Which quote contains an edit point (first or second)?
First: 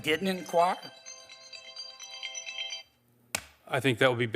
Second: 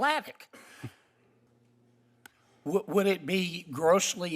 second